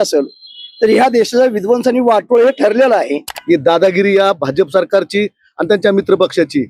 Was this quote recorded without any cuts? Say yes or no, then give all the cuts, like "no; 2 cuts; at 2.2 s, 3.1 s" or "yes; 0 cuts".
no; 1 cut; at 3.3 s